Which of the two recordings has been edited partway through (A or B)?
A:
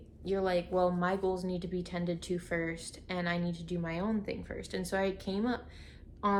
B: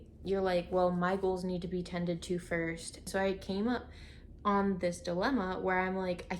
B